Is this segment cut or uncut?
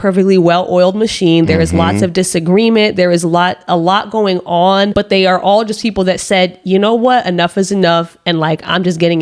uncut